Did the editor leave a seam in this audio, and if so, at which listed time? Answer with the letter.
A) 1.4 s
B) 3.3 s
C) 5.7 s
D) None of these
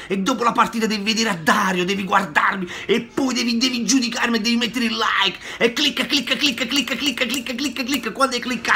D